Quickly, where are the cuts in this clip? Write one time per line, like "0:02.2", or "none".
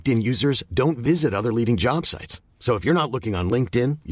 none